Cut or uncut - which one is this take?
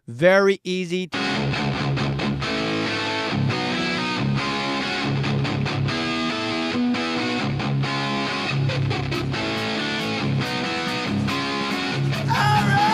uncut